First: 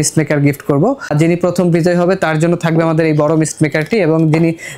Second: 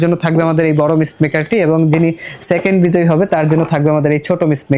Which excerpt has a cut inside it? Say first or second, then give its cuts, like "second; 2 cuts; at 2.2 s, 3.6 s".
first; 1 cut; at 1.1 s